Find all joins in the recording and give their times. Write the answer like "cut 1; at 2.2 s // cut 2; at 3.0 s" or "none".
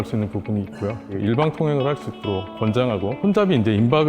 cut 1; at 1.0 s // cut 2; at 3.2 s